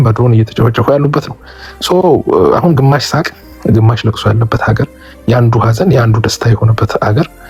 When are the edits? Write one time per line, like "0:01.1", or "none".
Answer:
none